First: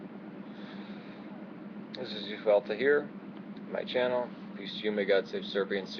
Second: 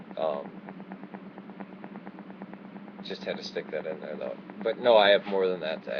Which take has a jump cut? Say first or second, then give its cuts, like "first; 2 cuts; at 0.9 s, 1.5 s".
second; 1 cut; at 1.5 s